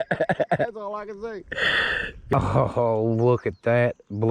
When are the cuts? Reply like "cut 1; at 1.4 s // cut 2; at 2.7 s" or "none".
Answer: cut 1; at 2.3 s

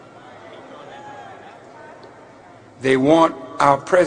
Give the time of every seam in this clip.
none

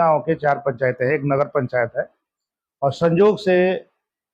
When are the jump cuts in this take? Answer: none

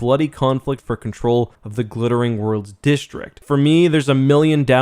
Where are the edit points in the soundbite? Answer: cut 1; at 3.4 s

